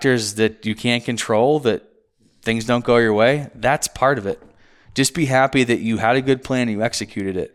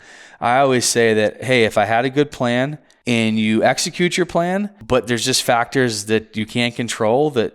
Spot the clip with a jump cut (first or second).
second